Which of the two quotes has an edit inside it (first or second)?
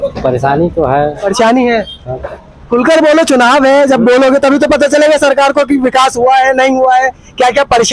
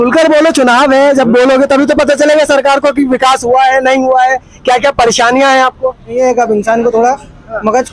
second